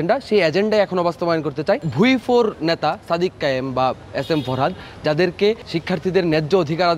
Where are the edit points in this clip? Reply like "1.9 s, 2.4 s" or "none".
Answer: 1.9 s, 5.7 s